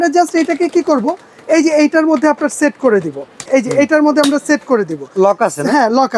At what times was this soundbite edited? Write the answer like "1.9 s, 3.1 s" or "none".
3.4 s